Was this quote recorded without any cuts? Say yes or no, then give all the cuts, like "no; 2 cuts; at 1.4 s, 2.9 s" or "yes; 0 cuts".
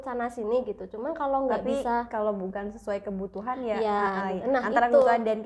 yes; 0 cuts